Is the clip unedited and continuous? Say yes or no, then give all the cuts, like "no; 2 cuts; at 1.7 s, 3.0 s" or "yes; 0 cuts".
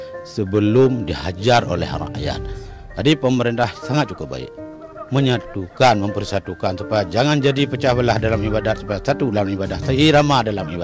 yes; 0 cuts